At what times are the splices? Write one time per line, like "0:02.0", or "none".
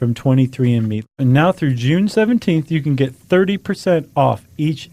0:01.1